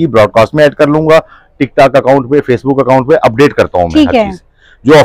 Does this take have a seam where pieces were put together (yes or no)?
no